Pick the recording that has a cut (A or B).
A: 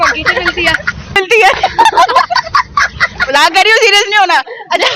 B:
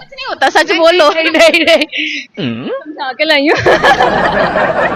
A